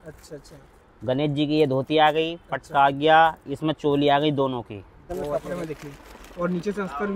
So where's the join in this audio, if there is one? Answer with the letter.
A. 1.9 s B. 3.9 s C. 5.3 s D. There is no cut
C